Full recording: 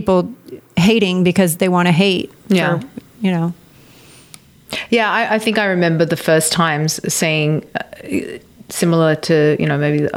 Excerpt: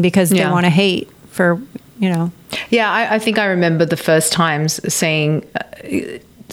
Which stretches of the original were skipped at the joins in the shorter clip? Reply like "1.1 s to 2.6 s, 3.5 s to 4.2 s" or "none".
3.7 s to 4.7 s